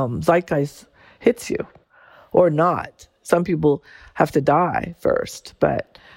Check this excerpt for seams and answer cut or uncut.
cut